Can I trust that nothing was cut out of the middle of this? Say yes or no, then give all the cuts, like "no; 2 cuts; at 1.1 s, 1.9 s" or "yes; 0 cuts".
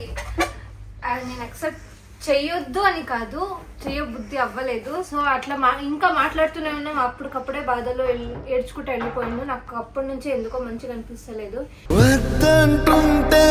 yes; 0 cuts